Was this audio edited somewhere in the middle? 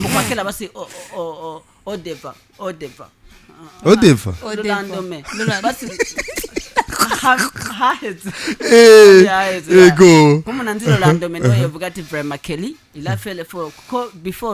no; 0 cuts

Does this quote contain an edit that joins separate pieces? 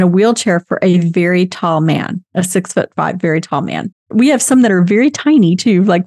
yes; 1 cut; at 4.1 s

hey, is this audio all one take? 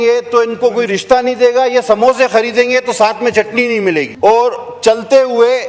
no; 1 cut; at 4.1 s

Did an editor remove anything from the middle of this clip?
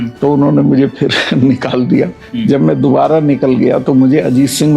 yes; 1 cut; at 2.2 s

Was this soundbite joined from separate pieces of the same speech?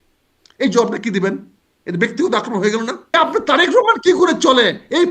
yes; 1 cut; at 3.1 s

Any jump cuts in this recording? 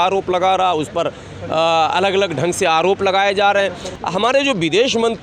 yes; 1 cut; at 3.9 s

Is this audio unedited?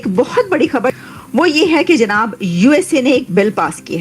no; 1 cut; at 0.9 s

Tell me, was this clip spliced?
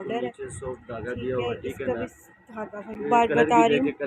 yes; 1 cut; at 3.0 s

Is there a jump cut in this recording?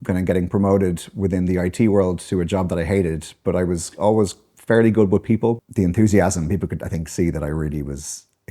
yes; 1 cut; at 5.7 s

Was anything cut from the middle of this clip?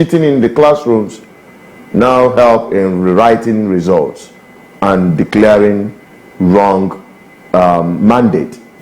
no; 0 cuts

